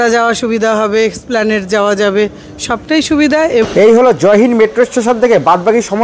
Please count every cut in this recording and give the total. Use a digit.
1